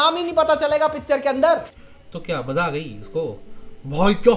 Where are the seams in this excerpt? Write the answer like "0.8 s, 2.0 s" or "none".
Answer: 1.7 s